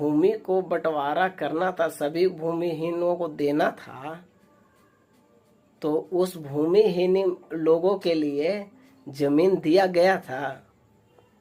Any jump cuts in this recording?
no; 0 cuts

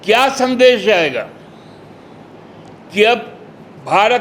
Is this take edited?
yes; 1 cut; at 2.3 s

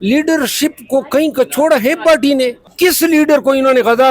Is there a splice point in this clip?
yes; 1 cut; at 2.6 s

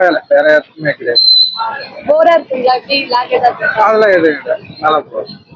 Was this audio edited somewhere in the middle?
no; 0 cuts

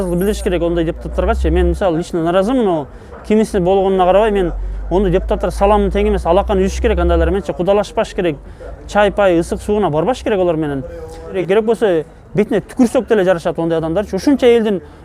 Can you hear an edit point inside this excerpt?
yes; 1 cut; at 11.3 s

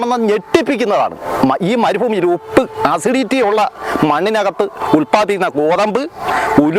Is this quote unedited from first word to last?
yes; 0 cuts

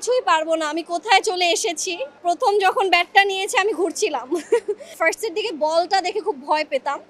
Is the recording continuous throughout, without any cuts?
no; 2 cuts; at 2.2 s, 5.0 s

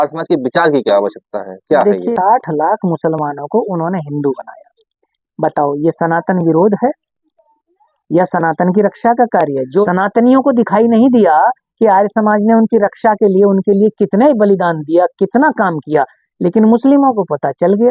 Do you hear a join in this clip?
yes; 2 cuts; at 2.1 s, 9.9 s

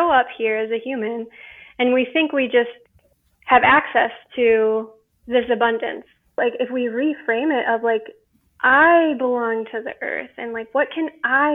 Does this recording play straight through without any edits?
no; 1 cut; at 6.4 s

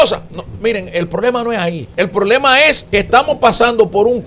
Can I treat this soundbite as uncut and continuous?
no; 2 cuts; at 1.8 s, 2.8 s

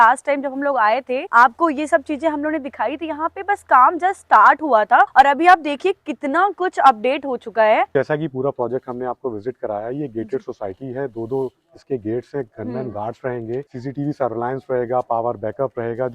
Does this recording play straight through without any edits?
no; 4 cuts; at 1.2 s, 5.1 s, 7.9 s, 13.7 s

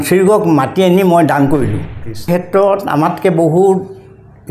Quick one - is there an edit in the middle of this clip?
yes; 1 cut; at 2.3 s

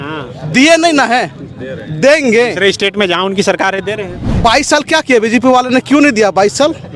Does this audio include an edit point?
yes; 1 cut; at 4.3 s

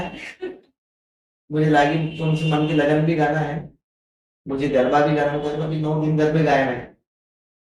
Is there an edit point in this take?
no; 0 cuts

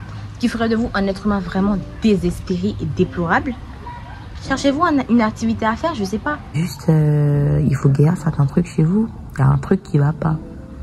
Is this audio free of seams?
no; 1 cut; at 6.6 s

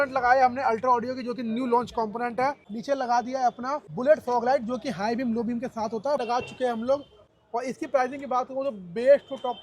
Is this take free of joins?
no; 4 cuts; at 2.7 s, 3.8 s, 6.2 s, 7.2 s

